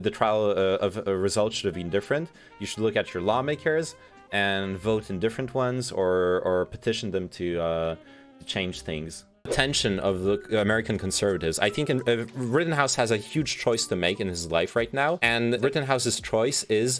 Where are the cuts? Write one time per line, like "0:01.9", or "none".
0:09.5